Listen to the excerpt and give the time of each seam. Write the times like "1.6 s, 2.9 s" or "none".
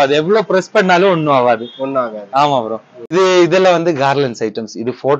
2.9 s